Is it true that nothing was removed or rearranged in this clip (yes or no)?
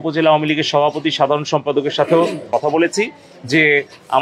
no